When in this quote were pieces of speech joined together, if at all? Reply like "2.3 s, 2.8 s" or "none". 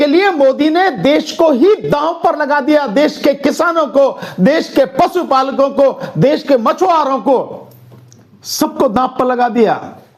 none